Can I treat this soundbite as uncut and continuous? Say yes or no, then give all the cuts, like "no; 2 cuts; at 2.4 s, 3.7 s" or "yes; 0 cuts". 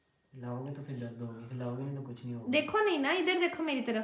yes; 0 cuts